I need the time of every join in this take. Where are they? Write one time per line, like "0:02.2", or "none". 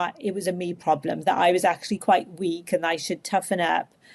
none